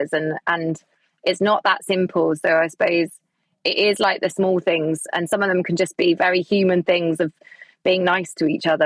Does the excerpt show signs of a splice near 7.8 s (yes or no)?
no